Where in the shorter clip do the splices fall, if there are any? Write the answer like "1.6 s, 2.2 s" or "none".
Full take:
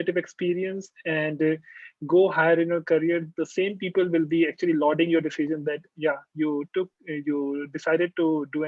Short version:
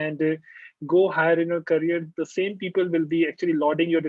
none